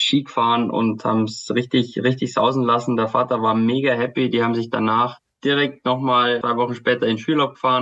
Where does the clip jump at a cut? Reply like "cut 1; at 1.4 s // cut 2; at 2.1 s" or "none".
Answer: none